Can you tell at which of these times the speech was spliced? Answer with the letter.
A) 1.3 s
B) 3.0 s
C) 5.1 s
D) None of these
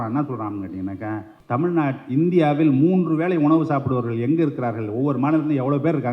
A